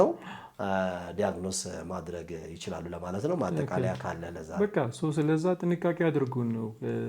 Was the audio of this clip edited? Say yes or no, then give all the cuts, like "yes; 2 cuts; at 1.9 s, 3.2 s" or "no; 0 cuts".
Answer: no; 0 cuts